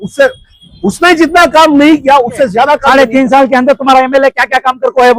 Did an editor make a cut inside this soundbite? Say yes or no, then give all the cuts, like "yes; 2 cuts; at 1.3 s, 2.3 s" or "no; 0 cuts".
yes; 1 cut; at 2.8 s